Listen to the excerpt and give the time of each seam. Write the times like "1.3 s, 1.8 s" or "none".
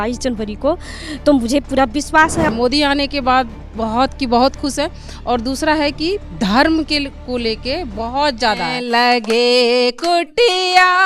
2.5 s, 8.8 s